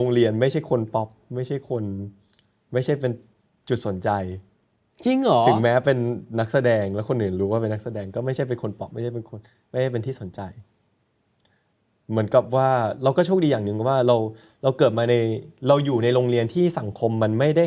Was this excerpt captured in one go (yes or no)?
yes